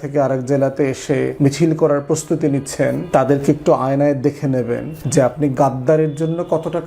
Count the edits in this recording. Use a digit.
3